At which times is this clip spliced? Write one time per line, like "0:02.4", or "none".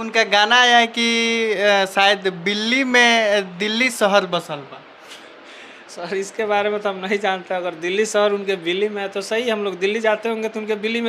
none